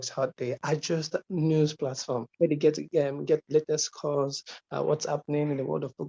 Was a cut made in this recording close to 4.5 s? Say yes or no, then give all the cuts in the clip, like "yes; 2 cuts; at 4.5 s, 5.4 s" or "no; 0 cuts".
no; 1 cut; at 2.3 s